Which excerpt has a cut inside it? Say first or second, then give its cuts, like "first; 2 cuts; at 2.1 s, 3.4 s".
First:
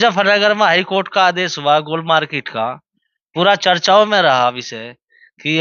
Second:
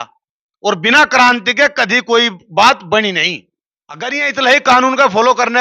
second; 1 cut; at 4.2 s